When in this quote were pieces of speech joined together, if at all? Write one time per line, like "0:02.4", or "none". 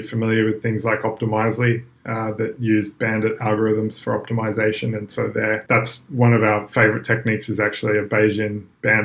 0:05.6